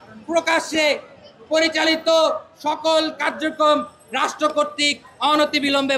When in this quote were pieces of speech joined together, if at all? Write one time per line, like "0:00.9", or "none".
none